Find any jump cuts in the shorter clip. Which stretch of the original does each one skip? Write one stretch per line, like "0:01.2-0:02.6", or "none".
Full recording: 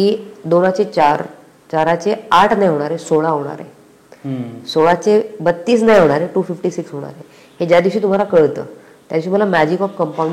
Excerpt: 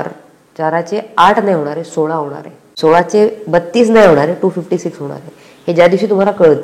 0:03.8-0:04.5